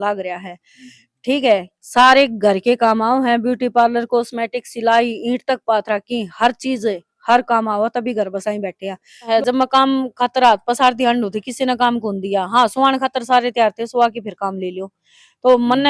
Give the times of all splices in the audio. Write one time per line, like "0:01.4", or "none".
0:09.3